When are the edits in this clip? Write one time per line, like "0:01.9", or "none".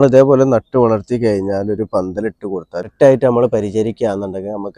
0:02.9